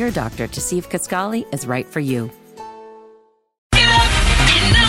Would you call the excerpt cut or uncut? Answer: cut